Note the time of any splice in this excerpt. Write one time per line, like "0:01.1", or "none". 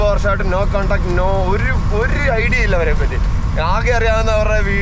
none